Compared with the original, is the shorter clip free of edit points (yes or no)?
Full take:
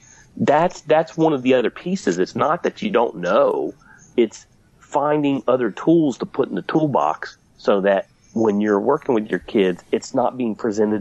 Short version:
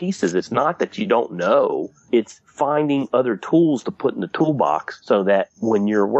no